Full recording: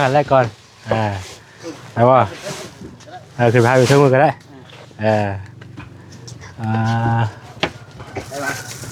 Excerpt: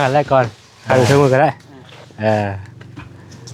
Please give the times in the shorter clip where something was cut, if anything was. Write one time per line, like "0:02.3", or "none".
0:00.9